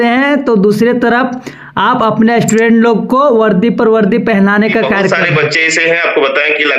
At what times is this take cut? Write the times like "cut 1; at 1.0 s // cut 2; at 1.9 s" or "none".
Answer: cut 1; at 5.1 s